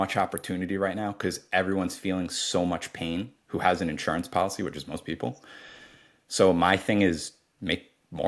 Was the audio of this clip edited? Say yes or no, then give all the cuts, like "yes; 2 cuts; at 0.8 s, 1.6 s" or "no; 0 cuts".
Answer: no; 0 cuts